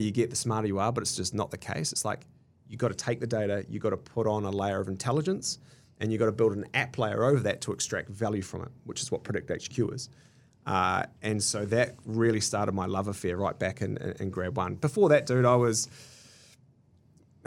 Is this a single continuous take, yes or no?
yes